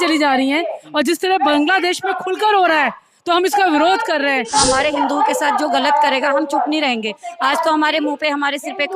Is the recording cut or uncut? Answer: cut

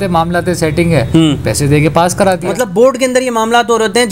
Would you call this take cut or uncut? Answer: cut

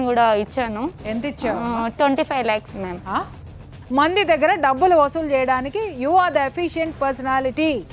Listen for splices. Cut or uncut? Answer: cut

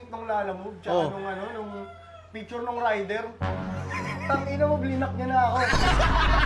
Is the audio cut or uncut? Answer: uncut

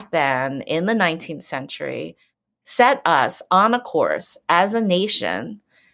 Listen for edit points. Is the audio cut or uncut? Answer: uncut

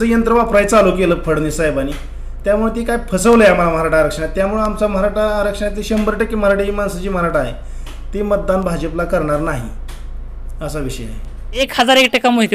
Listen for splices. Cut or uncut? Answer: cut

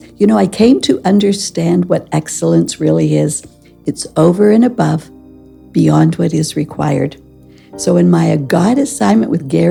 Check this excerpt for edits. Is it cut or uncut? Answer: uncut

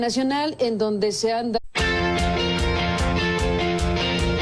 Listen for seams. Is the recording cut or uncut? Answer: uncut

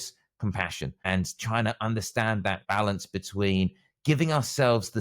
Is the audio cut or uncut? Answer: cut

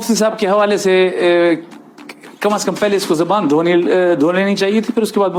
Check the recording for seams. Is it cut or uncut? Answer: uncut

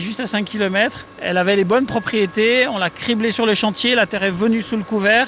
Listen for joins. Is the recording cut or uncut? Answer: cut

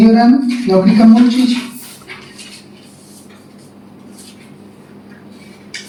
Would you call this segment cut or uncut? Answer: uncut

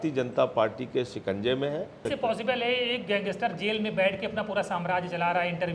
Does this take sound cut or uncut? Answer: cut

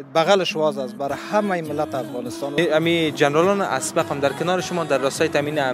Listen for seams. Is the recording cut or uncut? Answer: cut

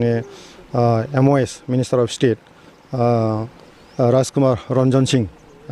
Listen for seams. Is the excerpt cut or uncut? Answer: uncut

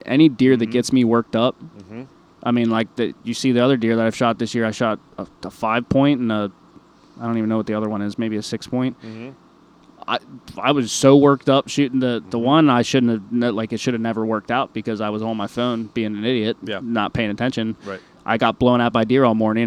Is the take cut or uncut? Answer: uncut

